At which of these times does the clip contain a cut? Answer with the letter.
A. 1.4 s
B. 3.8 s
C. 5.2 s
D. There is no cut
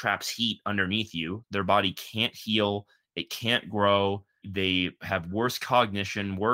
A